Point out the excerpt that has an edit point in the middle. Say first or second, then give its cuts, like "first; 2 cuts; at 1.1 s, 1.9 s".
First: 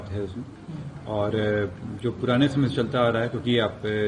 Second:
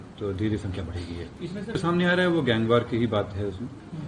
second; 1 cut; at 1.8 s